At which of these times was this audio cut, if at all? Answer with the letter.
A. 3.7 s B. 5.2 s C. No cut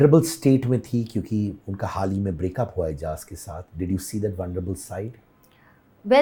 C